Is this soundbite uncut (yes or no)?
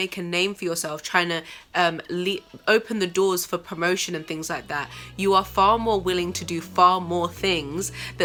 yes